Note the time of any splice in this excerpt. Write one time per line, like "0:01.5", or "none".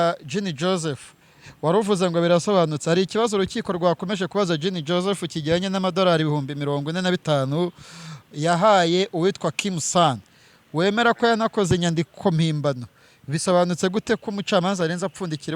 none

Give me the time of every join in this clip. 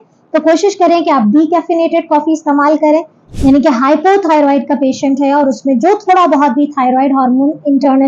0:03.2

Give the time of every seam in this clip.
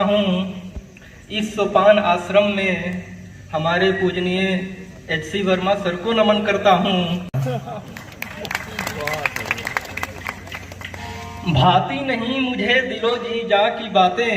0:07.3

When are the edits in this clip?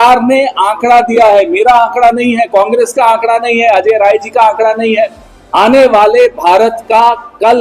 0:05.3

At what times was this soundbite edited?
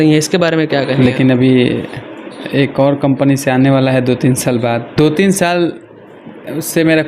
0:00.9
0:04.9

